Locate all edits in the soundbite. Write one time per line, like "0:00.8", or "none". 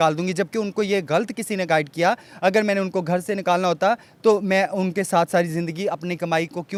none